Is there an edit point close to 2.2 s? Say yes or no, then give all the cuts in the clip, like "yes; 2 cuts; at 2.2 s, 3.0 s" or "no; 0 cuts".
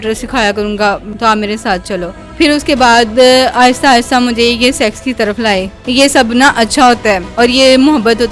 yes; 4 cuts; at 1.1 s, 2.2 s, 5.8 s, 7.3 s